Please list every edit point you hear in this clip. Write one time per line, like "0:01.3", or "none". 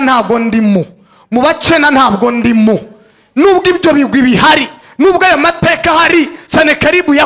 none